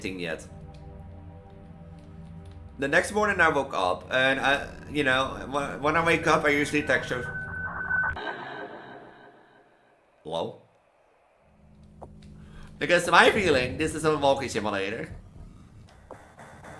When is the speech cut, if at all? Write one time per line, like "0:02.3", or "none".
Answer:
0:11.8